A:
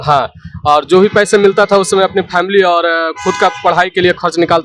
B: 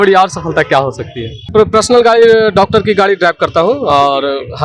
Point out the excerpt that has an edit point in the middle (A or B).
B